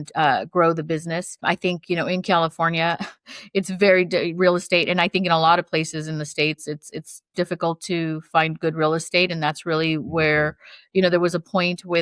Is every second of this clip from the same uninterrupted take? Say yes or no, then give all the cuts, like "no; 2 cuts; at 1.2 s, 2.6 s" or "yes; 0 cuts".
no; 1 cut; at 1.4 s